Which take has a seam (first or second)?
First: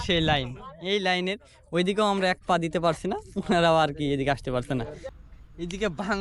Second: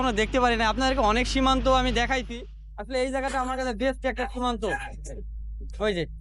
first